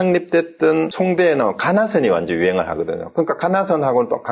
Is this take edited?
yes; 1 cut; at 0.9 s

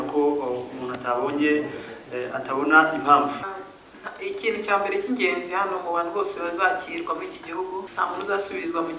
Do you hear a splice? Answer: yes; 2 cuts; at 3.4 s, 7.9 s

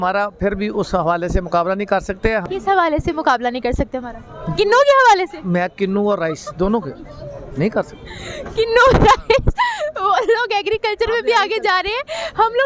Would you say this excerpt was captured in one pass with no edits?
no; 1 cut; at 2.5 s

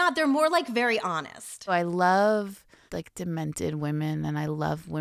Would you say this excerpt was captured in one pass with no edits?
no; 1 cut; at 1.7 s

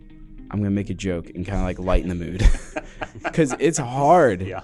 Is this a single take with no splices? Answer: yes; 0 cuts

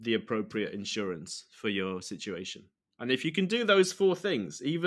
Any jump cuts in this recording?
no; 0 cuts

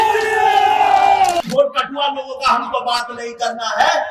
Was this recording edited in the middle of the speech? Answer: yes; 1 cut; at 1.5 s

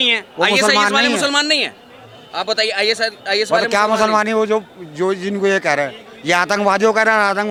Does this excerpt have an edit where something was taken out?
no; 0 cuts

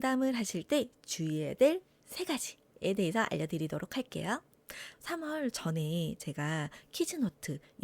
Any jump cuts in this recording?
yes; 1 cut; at 4.9 s

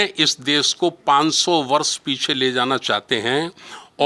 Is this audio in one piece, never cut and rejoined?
yes; 0 cuts

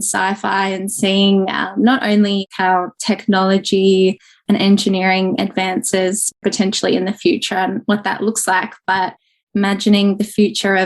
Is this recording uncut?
no; 2 cuts; at 2.5 s, 6.3 s

